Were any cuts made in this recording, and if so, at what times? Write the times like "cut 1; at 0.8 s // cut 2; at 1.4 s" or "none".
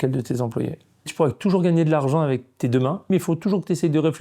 cut 1; at 1.1 s // cut 2; at 3.1 s